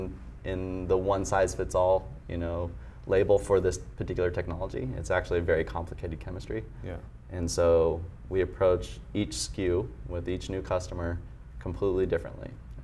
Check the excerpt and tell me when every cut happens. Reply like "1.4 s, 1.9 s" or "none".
none